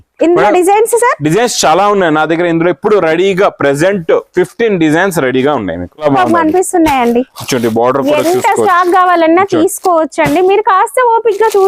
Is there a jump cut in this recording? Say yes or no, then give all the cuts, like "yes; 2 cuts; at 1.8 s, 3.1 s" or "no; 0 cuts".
yes; 1 cut; at 6.0 s